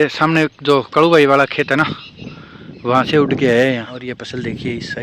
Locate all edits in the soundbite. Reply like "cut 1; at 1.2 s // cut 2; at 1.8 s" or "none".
cut 1; at 3.9 s